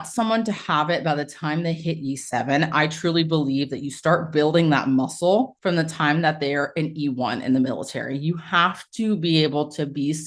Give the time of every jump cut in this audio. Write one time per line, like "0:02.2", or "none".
0:05.5